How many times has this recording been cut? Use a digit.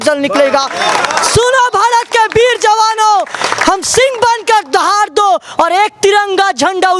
0